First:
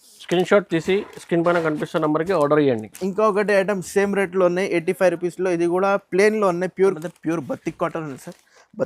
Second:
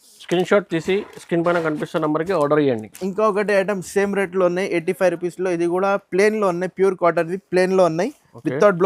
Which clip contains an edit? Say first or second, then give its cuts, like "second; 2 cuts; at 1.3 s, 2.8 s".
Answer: first; 1 cut; at 7.0 s